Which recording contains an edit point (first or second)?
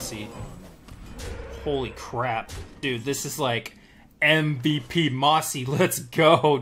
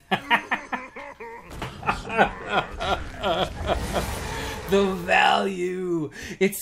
first